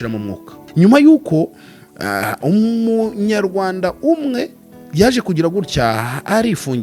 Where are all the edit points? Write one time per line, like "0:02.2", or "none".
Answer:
none